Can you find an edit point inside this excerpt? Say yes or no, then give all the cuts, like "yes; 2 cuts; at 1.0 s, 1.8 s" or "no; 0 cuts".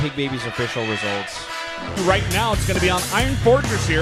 no; 0 cuts